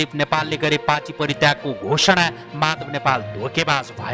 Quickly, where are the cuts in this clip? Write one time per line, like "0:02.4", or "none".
none